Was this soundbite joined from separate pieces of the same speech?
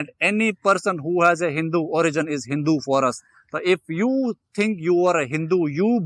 no; 0 cuts

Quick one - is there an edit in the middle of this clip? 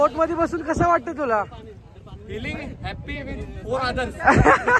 no; 0 cuts

